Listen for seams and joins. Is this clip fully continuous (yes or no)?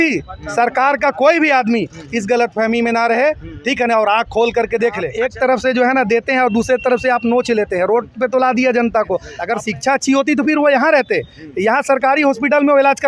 no